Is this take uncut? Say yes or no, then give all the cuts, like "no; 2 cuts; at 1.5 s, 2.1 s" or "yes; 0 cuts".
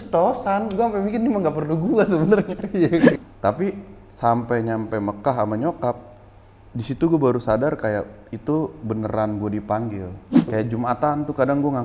no; 2 cuts; at 3.1 s, 10.5 s